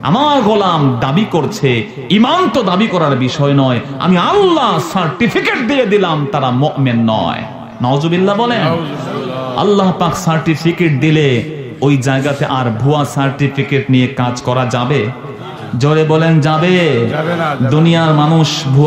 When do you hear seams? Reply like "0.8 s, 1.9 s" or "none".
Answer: none